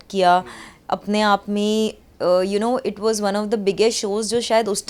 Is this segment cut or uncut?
uncut